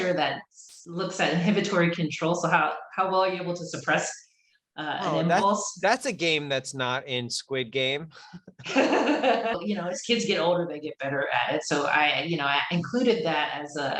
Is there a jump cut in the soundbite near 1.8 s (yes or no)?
no